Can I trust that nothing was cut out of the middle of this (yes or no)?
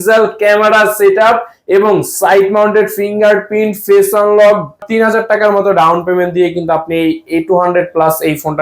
no